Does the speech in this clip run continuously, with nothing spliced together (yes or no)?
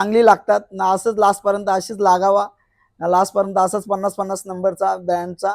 yes